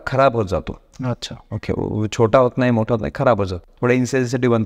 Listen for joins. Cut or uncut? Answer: uncut